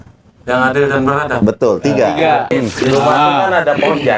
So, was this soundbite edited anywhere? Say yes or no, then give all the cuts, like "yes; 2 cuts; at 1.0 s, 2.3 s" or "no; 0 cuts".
yes; 1 cut; at 2.5 s